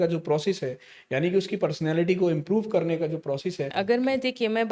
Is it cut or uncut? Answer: cut